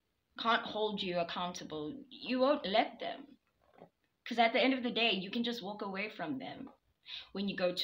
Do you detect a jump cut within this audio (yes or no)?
no